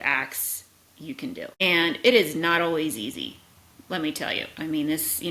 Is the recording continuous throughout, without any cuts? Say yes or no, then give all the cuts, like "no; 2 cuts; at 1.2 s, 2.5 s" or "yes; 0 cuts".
yes; 0 cuts